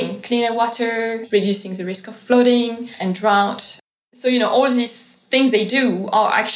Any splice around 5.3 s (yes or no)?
no